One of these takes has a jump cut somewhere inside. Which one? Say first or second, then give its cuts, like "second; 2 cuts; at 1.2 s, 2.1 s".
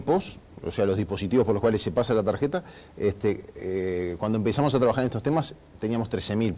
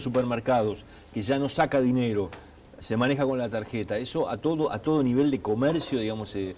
first; 1 cut; at 2.3 s